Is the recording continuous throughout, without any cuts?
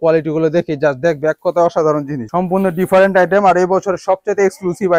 yes; 0 cuts

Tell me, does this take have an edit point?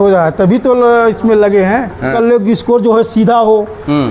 yes; 1 cut; at 2.1 s

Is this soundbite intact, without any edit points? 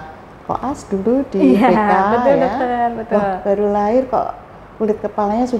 yes; 0 cuts

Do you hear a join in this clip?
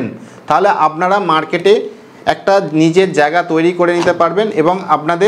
no; 0 cuts

